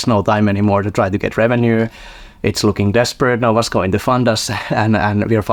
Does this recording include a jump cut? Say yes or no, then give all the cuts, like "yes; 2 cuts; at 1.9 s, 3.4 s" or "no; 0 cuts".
no; 0 cuts